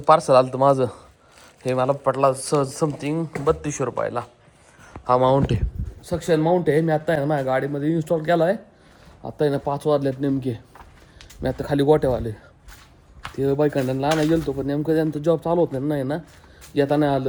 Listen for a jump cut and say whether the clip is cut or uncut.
uncut